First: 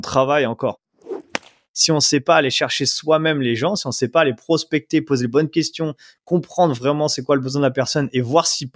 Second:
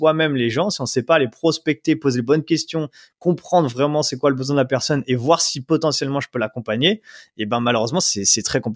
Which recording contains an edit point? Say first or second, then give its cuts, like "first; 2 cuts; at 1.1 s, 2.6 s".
first; 1 cut; at 1.5 s